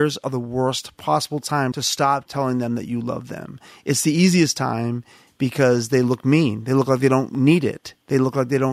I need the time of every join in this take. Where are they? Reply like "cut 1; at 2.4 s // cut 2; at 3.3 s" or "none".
cut 1; at 1.0 s